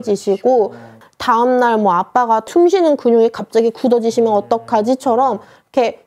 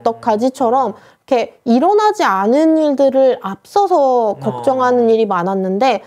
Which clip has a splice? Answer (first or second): first